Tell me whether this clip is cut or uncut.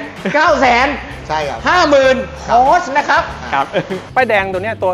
cut